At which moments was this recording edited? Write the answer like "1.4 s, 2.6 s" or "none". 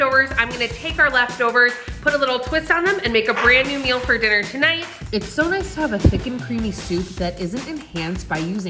4.9 s